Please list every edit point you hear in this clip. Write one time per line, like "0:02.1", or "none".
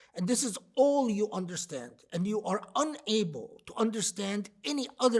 none